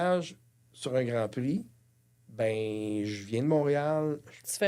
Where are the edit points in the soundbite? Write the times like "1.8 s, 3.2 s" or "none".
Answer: none